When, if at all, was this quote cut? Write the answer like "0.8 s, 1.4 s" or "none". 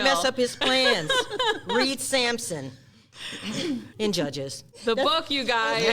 3.9 s, 4.6 s

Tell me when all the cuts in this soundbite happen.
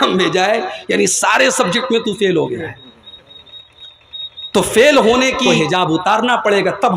5.5 s

